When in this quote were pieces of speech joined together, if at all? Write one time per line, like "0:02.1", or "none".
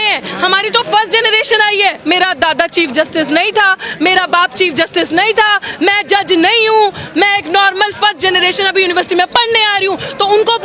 0:02.0